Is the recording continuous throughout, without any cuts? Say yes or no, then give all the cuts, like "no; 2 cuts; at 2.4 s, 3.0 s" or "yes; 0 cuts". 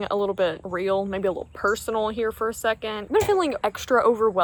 yes; 0 cuts